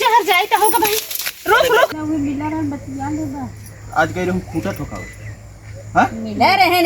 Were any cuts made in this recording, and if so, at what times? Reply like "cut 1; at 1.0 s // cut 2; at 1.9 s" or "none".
cut 1; at 1.9 s